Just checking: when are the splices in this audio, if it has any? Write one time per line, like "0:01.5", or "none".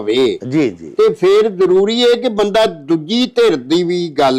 none